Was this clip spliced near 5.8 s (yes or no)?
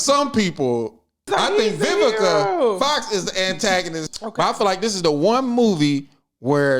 no